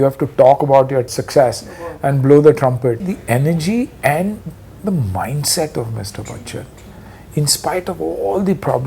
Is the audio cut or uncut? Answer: cut